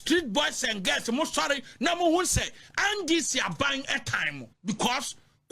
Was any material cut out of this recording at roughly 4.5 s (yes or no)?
yes